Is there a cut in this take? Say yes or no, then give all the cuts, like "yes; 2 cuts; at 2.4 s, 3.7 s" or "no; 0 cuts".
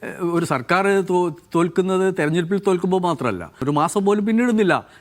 yes; 1 cut; at 3.6 s